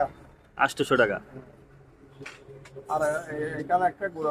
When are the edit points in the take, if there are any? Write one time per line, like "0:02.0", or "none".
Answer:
none